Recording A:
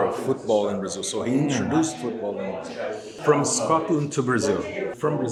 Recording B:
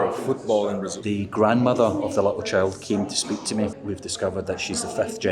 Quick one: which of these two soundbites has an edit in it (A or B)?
B